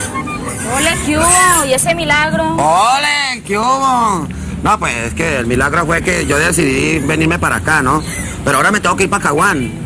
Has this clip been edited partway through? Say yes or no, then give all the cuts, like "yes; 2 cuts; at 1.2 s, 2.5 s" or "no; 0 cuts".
no; 0 cuts